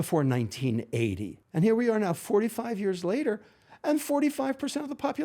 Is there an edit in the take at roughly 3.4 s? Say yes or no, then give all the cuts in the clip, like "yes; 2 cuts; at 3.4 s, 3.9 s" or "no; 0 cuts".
no; 1 cut; at 1.3 s